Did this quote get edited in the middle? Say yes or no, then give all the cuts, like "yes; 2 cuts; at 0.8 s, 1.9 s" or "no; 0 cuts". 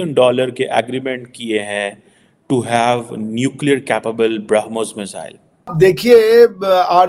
yes; 1 cut; at 5.6 s